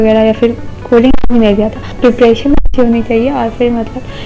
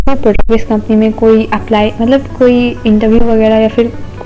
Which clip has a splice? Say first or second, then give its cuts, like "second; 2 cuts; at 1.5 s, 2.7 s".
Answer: first; 1 cut; at 1.9 s